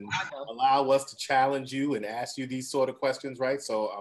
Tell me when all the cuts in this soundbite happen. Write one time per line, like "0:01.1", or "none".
none